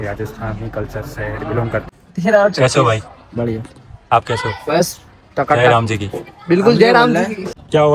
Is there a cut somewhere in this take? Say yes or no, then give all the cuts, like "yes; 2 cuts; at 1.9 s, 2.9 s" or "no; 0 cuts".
no; 0 cuts